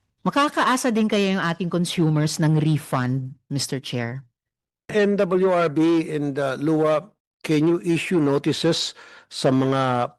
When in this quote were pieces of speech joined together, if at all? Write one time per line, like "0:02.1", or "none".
0:04.8